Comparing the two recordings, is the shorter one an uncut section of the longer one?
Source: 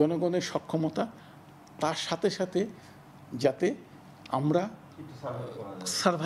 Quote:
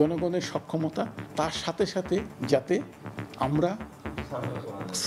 no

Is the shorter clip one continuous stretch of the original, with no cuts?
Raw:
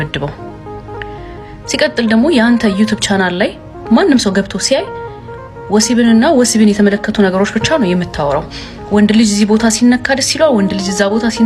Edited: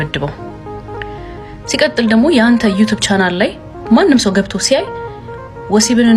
yes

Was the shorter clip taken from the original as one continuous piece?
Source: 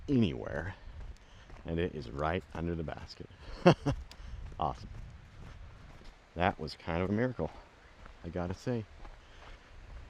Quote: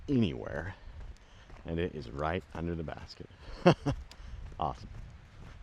yes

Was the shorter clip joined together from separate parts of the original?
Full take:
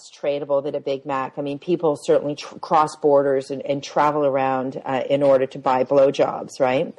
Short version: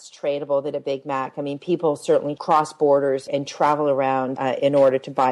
yes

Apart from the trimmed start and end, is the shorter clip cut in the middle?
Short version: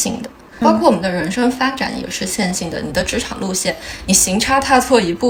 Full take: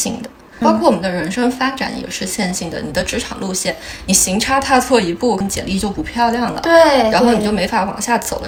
no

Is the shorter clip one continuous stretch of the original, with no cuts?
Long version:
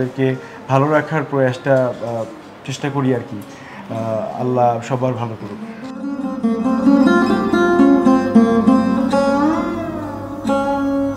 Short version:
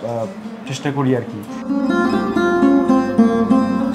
no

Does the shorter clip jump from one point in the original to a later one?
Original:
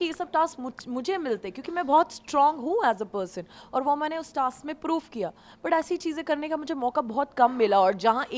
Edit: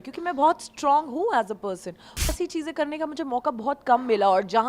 yes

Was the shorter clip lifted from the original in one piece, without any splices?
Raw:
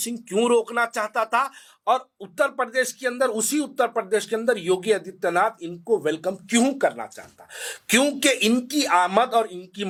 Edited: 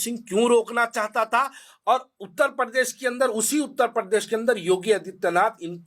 yes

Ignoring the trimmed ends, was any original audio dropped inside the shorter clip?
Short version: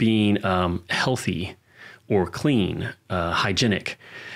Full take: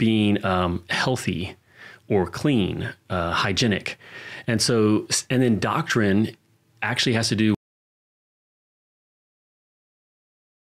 no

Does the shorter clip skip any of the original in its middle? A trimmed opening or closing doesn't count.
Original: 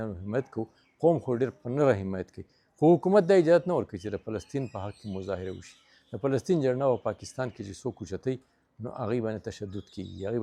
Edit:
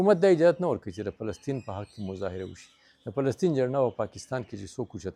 no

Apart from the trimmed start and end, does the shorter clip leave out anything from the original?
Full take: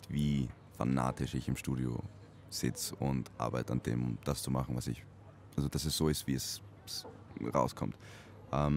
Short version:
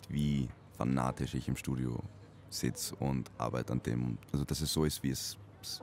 yes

